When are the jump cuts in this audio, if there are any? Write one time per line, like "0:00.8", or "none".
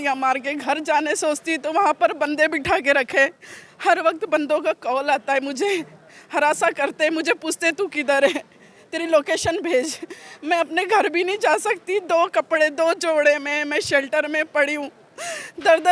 none